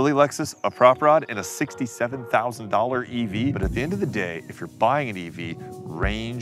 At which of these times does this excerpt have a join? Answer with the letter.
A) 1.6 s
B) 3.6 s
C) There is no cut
B